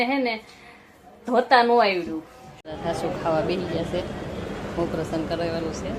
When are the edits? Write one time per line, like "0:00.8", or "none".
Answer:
0:02.6